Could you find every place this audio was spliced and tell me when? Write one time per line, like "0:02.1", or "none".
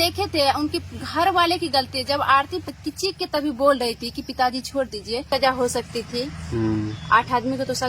0:02.7
0:05.3